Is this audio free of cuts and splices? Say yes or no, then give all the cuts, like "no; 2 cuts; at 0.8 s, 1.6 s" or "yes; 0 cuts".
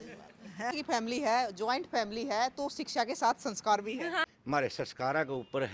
no; 2 cuts; at 0.8 s, 4.2 s